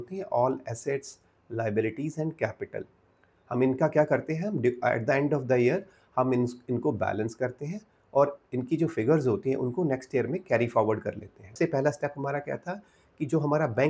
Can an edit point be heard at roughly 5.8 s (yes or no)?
no